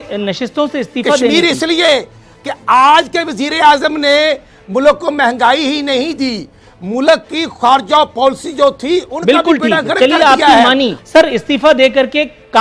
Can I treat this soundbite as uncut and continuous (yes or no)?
no